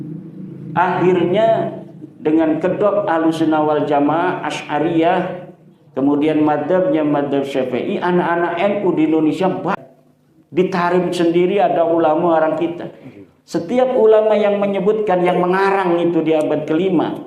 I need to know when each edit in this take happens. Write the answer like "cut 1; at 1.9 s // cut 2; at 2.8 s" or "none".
cut 1; at 9.8 s